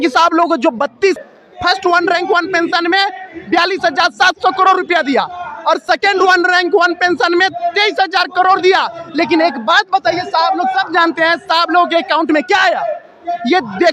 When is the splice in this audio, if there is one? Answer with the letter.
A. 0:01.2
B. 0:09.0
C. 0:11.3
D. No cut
A